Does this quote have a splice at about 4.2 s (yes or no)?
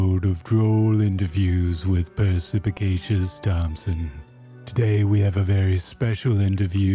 yes